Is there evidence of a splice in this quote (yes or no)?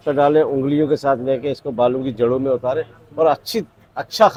no